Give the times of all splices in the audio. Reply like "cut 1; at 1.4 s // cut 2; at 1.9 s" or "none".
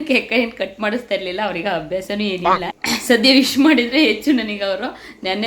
cut 1; at 2.7 s

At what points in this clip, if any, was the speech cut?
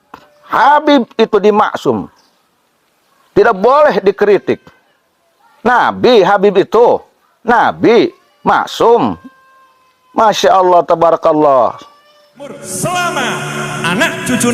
cut 1; at 12.6 s

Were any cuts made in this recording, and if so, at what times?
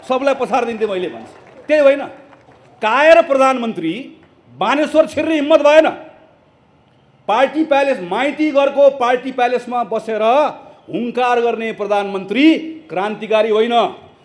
none

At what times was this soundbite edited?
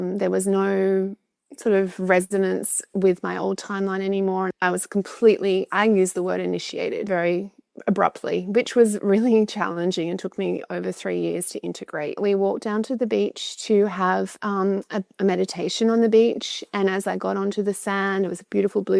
cut 1; at 4.5 s // cut 2; at 7.0 s // cut 3; at 12.2 s

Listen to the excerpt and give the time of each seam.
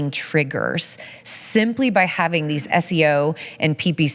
none

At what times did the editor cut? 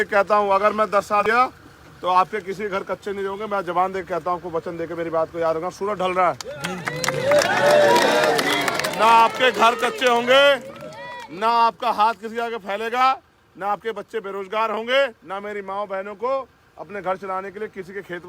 cut 1; at 1.2 s

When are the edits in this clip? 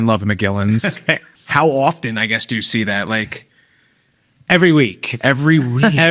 cut 1; at 1.3 s

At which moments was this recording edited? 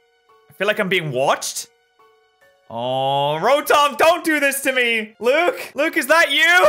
cut 1; at 5.1 s // cut 2; at 5.7 s

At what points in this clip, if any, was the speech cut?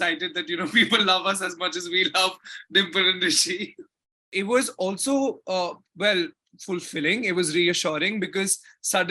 cut 1; at 4.3 s

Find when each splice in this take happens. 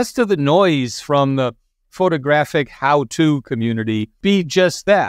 cut 1; at 4.2 s

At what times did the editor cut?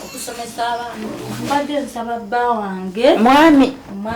cut 1; at 1.3 s

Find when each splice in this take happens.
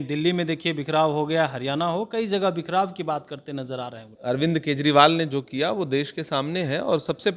cut 1; at 4.1 s

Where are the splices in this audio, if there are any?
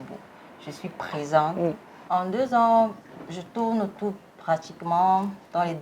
cut 1; at 1.9 s

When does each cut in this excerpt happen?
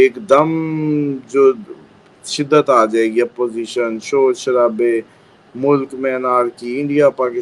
none

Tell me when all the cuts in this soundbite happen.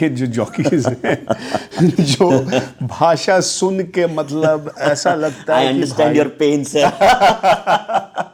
none

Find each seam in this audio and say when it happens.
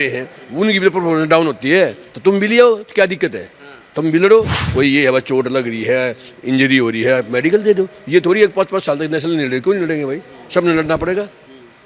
cut 1; at 4.6 s

